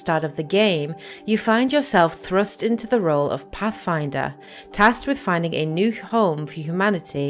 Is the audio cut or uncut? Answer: cut